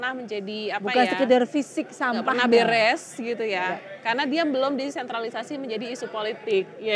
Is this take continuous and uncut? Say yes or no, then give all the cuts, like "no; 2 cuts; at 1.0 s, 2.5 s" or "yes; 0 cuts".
yes; 0 cuts